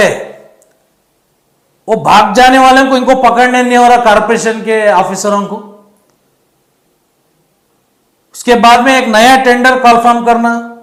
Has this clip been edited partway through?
no; 0 cuts

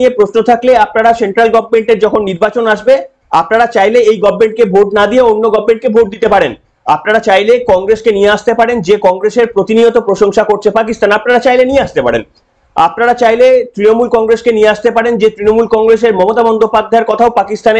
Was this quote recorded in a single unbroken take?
yes; 0 cuts

